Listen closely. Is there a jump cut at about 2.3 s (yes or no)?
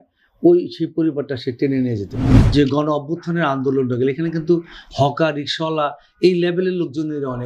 yes